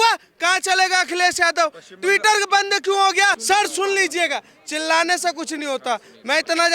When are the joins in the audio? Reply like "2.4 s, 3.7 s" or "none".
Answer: 3.4 s

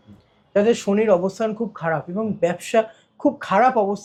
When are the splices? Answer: none

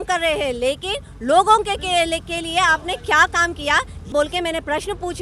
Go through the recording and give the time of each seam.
4.1 s

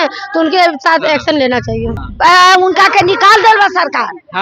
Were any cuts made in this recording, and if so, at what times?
2.0 s

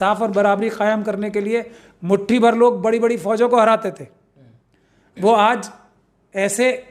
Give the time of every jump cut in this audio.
none

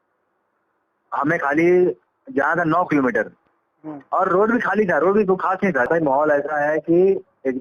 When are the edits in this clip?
5.9 s

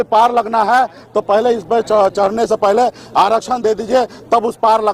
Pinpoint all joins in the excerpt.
none

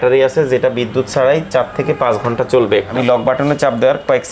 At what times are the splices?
2.9 s

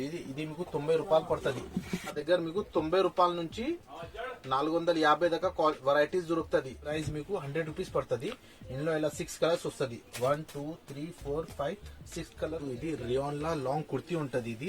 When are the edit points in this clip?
2.2 s, 6.9 s, 12.6 s

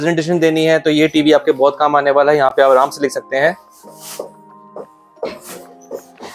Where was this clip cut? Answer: none

